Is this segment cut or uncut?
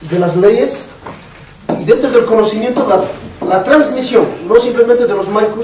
uncut